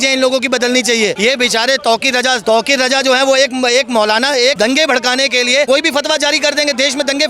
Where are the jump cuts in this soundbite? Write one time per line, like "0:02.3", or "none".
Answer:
0:01.2
0:02.4
0:04.6
0:05.7